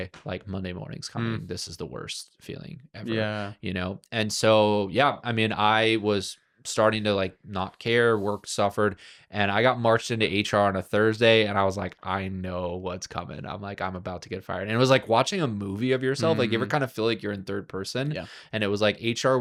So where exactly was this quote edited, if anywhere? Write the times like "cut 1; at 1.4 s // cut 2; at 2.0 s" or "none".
none